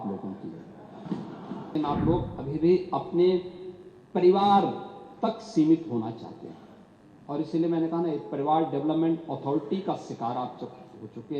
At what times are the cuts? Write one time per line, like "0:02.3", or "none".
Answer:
0:01.8

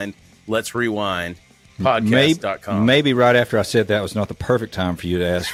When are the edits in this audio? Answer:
none

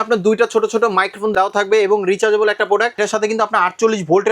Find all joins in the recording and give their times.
0:01.3
0:03.0

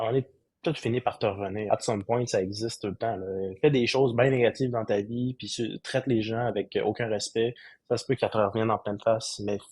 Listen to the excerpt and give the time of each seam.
0:01.6

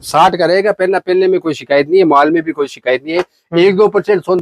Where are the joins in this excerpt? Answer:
none

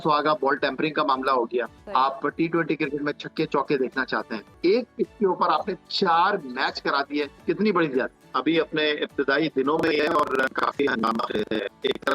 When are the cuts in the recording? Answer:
0:01.8
0:04.6
0:07.3
0:08.2

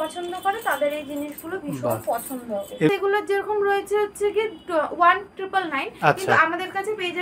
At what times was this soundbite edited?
0:02.9

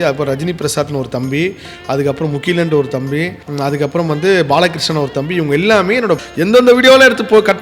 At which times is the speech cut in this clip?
0:03.4
0:06.2

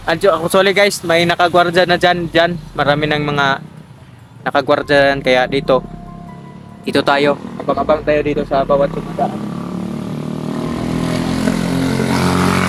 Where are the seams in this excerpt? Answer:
none

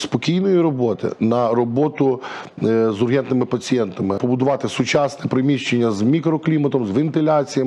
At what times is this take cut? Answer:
0:04.2

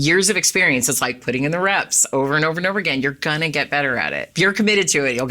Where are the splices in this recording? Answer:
0:04.2

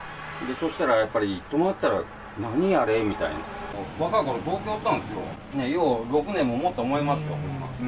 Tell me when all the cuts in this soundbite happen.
0:03.6
0:05.3

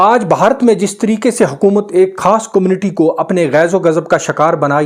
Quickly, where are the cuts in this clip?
none

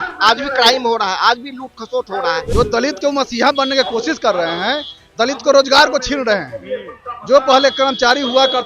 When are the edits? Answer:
0:02.5

